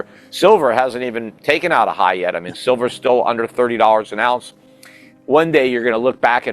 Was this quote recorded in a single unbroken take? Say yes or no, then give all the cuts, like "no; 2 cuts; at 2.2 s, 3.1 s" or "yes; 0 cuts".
no; 1 cut; at 5.2 s